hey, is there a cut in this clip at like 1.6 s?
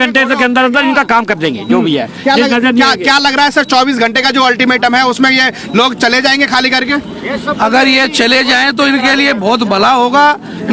no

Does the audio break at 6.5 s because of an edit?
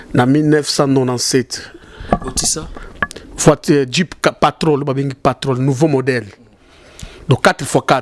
no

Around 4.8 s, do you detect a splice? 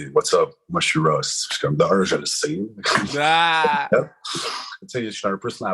yes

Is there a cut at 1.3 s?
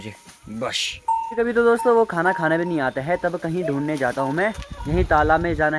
yes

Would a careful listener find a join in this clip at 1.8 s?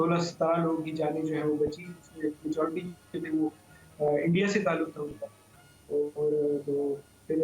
no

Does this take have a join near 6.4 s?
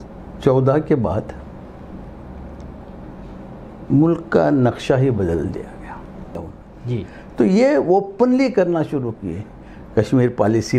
yes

